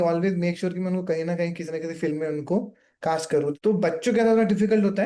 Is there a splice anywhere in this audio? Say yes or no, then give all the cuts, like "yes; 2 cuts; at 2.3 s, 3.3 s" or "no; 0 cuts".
yes; 1 cut; at 3.6 s